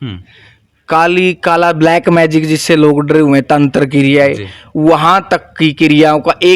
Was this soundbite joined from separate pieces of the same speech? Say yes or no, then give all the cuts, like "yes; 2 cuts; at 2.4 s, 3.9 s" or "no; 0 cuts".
no; 0 cuts